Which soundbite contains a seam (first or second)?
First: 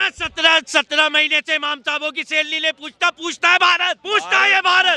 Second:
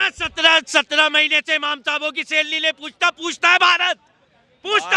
first